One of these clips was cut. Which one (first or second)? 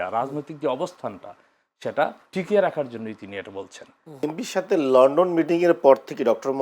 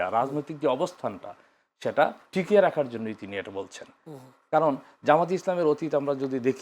first